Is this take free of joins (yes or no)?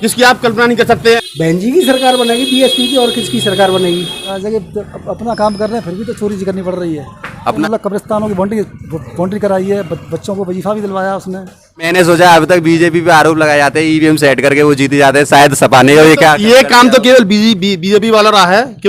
no